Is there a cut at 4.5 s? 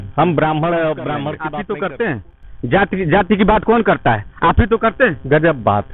no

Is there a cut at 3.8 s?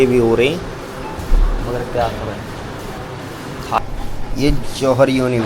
yes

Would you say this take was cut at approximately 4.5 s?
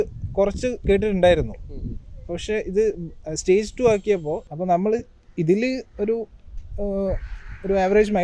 yes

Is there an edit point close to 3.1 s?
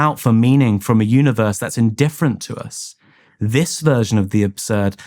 yes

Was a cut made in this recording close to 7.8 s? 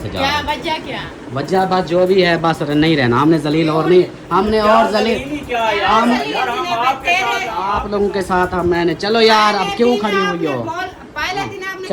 yes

